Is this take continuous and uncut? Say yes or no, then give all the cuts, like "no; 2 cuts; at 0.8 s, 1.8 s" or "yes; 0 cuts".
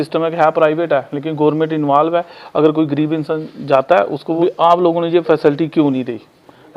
no; 1 cut; at 4.4 s